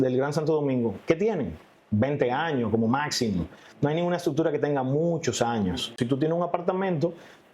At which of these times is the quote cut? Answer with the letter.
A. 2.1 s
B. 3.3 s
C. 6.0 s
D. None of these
C